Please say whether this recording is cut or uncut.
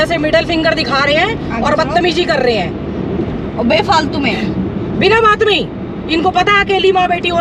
uncut